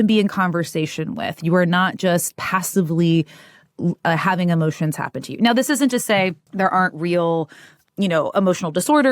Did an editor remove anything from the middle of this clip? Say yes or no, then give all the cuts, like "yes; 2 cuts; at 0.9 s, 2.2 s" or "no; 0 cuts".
no; 0 cuts